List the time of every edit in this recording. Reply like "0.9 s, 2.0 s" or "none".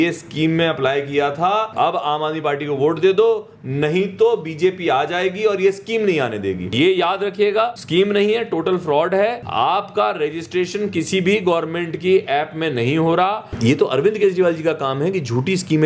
1.7 s, 6.7 s, 7.8 s, 9.4 s, 13.5 s